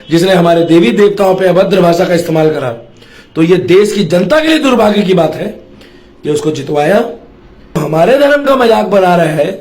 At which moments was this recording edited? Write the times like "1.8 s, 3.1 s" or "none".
7.8 s